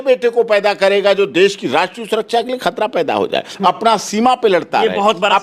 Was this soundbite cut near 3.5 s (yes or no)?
no